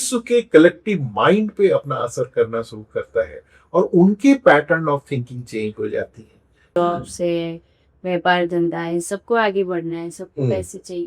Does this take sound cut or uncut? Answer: cut